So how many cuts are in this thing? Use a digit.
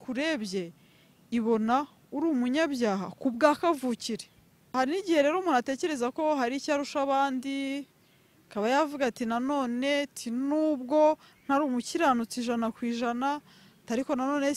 1